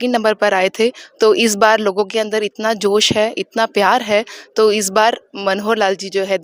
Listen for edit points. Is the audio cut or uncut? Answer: uncut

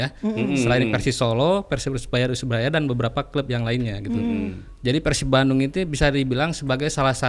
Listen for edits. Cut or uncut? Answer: uncut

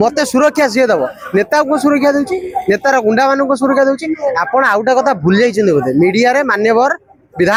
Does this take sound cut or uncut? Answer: uncut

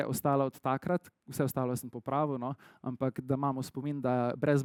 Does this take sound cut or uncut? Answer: uncut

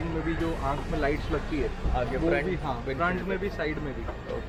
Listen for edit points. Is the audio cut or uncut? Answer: uncut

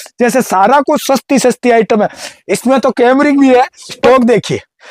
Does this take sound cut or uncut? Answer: cut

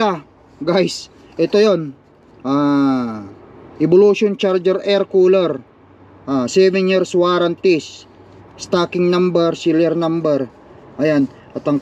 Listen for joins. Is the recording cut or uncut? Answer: uncut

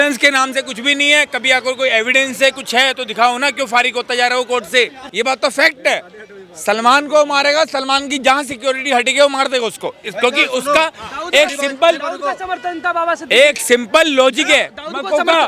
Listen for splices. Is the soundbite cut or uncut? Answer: cut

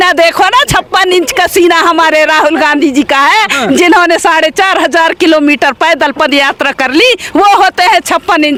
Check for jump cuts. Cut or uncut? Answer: uncut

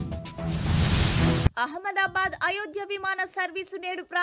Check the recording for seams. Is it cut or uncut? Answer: cut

